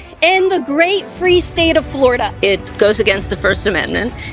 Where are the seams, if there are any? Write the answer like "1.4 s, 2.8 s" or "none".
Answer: 2.3 s